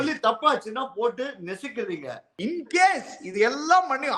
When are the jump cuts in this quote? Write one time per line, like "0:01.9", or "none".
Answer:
0:02.3